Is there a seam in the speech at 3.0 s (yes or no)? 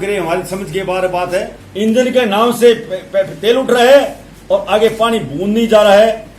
no